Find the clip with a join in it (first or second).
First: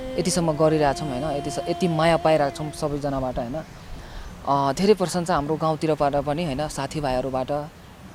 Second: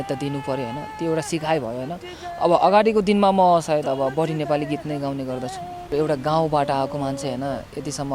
second